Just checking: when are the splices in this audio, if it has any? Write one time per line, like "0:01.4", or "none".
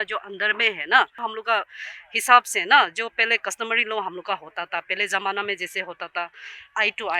0:01.2